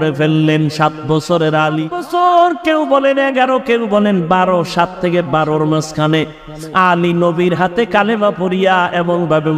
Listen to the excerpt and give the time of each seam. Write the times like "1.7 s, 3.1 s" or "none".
2.0 s